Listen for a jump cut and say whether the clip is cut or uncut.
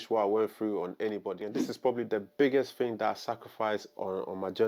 cut